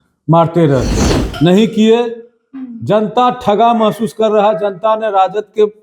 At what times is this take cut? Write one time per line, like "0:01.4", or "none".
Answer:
0:01.2